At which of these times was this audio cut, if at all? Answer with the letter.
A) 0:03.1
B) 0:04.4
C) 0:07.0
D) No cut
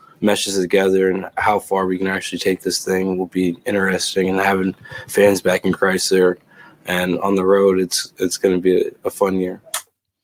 D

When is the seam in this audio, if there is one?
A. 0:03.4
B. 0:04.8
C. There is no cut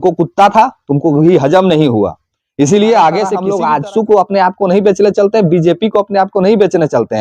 A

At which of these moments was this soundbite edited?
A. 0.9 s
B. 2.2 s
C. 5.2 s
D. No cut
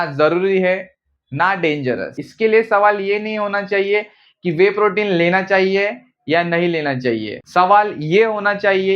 B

